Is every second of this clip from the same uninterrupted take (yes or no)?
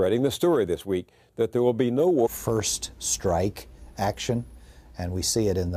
yes